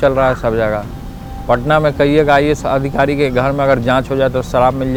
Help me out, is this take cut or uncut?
uncut